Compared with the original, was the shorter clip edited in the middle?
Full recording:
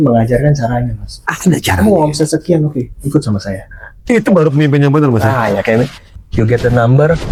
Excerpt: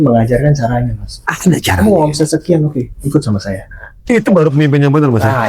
no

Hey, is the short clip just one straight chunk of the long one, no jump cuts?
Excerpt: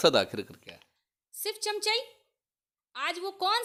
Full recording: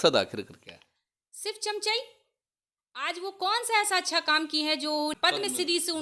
yes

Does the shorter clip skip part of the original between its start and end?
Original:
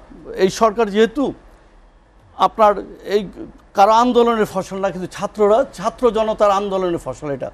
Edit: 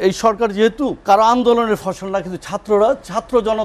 yes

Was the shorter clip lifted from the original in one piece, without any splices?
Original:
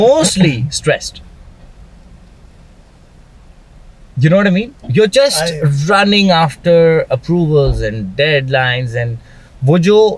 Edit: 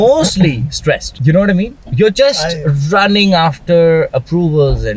no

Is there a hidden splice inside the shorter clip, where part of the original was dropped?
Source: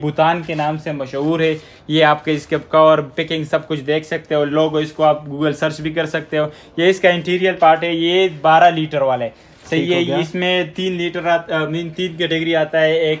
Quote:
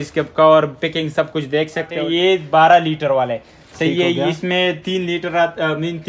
yes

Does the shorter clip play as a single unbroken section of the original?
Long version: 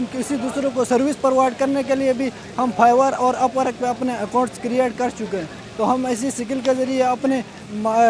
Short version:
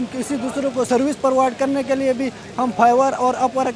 yes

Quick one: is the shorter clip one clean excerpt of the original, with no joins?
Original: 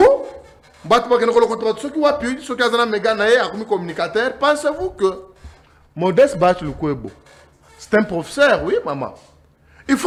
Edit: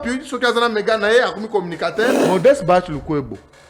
no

